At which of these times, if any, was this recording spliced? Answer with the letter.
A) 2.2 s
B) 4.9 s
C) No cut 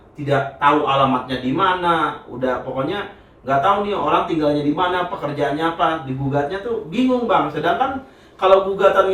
C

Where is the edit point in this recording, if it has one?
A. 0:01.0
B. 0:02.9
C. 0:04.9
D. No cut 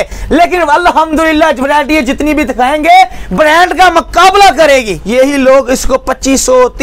C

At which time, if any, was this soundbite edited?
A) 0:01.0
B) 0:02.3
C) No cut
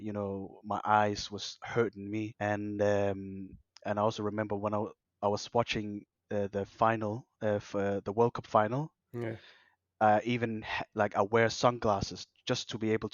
B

